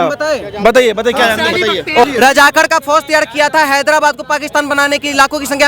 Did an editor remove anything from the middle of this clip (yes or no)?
yes